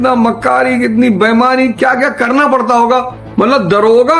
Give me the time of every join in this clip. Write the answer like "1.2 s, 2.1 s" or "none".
3.2 s